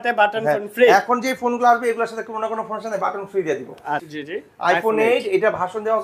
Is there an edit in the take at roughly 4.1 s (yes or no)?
yes